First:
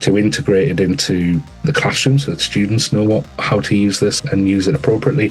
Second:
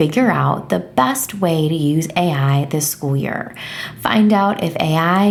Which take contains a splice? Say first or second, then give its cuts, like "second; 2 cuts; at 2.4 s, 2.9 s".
first; 2 cuts; at 1.6 s, 4.2 s